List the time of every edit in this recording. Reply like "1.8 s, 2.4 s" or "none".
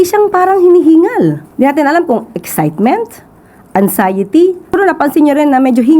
1.5 s, 4.8 s